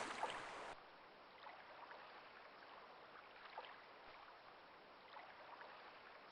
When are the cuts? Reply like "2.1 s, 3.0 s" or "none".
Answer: 0.8 s, 3.4 s, 4.4 s